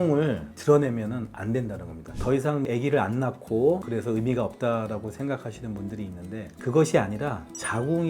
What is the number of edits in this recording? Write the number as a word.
one